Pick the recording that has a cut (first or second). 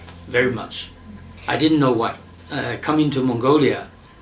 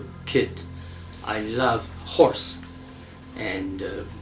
first